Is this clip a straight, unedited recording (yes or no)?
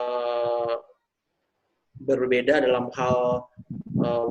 yes